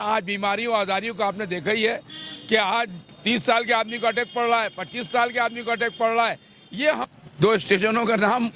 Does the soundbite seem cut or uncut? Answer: cut